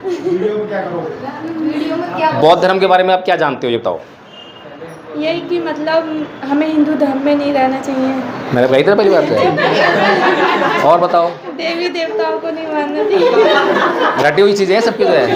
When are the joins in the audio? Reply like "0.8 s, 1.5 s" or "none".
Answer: none

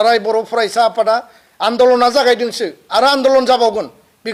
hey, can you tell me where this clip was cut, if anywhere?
none

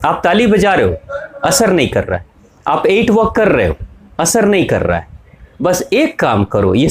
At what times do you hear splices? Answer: none

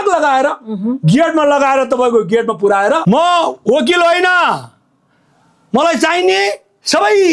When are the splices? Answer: 3.0 s

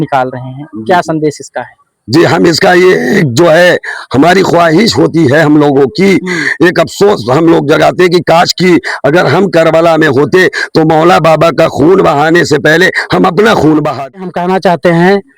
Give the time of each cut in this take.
14.2 s

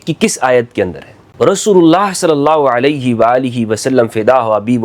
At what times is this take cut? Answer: 1.2 s

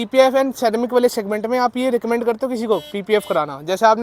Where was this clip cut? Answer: none

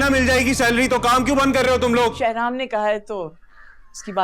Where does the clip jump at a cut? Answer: 2.2 s

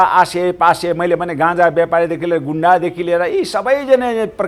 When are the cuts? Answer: none

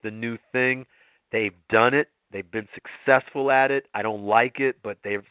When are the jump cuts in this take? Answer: none

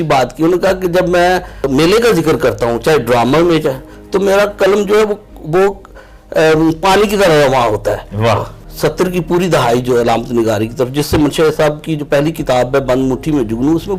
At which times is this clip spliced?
1.7 s, 8.6 s

